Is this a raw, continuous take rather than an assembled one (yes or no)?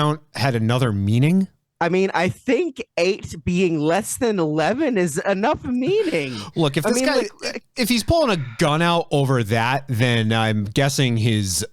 no